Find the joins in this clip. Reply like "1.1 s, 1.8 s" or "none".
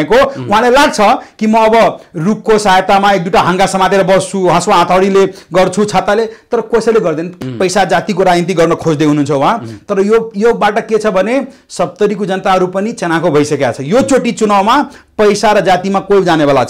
7.3 s